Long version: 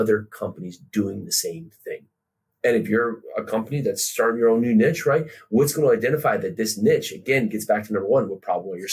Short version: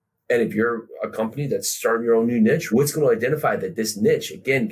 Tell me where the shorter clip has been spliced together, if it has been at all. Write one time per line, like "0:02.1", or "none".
0:02.6